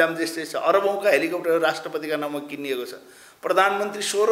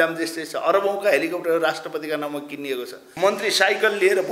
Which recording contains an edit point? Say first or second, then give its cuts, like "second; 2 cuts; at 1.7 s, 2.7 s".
second; 1 cut; at 3.0 s